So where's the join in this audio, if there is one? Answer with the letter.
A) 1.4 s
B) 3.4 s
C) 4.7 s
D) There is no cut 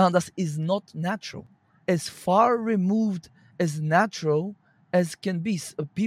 A